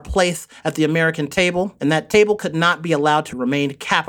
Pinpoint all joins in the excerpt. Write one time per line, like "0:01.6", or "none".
0:01.4